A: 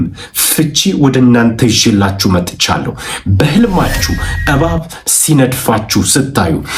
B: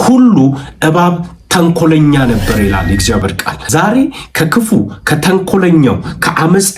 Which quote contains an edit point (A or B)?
B